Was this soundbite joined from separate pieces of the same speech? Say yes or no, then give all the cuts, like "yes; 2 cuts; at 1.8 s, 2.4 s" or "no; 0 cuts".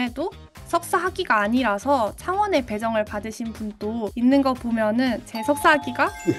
no; 0 cuts